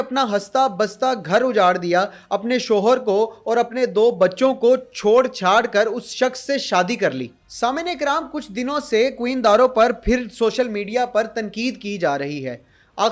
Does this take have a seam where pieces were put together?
no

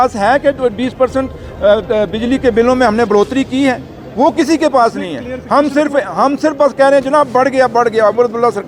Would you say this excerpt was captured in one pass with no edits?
yes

